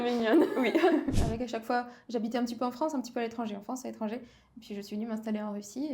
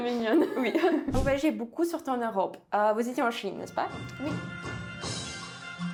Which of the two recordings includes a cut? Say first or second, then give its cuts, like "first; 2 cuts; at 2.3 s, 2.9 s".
first; 1 cut; at 1.1 s